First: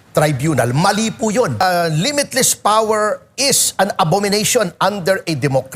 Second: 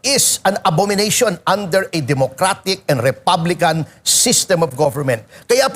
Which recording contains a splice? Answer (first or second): first